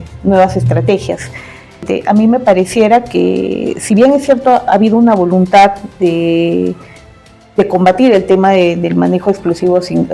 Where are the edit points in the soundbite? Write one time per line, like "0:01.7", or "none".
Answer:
0:01.9